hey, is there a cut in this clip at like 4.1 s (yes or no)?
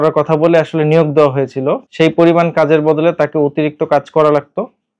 no